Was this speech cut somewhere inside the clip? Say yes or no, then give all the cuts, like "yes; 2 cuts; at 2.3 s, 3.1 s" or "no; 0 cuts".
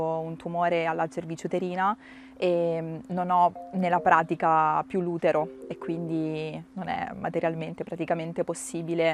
no; 0 cuts